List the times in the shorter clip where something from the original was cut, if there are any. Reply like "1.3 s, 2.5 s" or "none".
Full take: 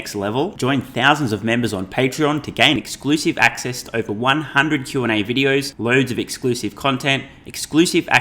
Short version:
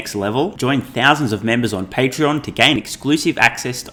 none